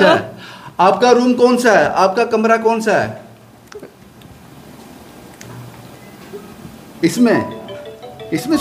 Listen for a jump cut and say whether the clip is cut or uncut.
uncut